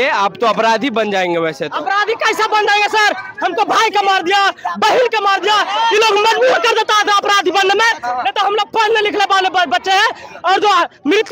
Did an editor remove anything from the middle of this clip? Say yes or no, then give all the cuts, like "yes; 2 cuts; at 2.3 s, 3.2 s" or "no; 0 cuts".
no; 0 cuts